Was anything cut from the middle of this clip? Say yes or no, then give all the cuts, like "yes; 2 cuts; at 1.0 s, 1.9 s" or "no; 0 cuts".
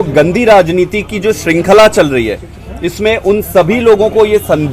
no; 0 cuts